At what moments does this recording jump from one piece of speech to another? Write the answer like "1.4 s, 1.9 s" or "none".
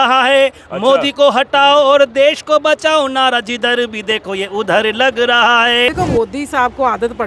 5.9 s

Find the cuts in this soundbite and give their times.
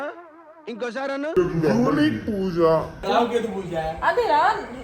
3.0 s

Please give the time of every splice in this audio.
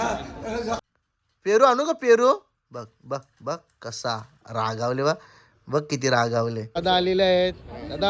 0.8 s, 6.8 s

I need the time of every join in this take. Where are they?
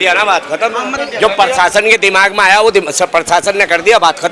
0.9 s

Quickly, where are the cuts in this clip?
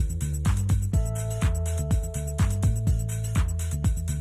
none

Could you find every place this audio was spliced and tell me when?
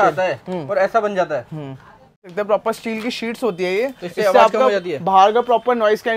2.3 s

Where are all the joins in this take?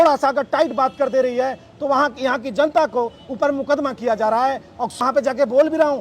5.0 s

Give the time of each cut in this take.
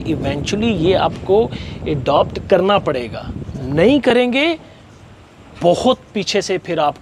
none

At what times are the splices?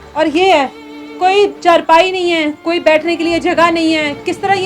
none

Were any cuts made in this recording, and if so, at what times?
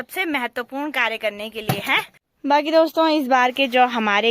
2.2 s

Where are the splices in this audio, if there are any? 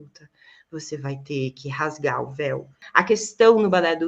2.8 s

